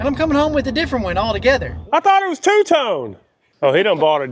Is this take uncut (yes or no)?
no